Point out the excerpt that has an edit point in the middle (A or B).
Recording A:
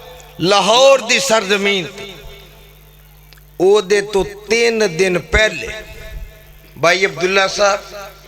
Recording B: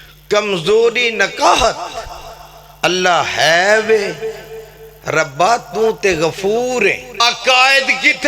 B